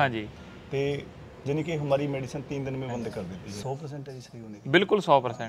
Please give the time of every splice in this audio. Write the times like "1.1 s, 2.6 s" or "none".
3.5 s